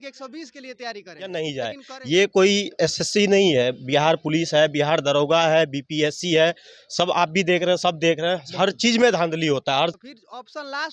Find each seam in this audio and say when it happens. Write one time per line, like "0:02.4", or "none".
0:01.3
0:10.0